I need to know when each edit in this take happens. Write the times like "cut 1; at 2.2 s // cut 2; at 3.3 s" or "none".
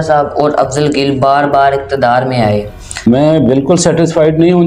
cut 1; at 3.1 s